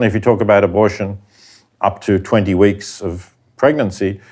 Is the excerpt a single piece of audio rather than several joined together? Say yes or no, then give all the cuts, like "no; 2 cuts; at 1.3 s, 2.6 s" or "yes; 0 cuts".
yes; 0 cuts